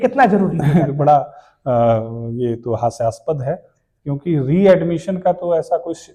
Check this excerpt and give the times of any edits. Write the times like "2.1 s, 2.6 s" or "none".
none